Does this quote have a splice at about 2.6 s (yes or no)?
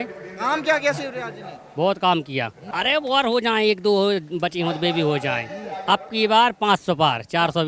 yes